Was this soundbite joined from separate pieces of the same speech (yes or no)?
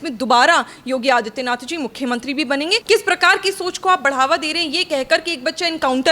yes